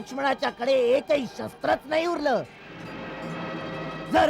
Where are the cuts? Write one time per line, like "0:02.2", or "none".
none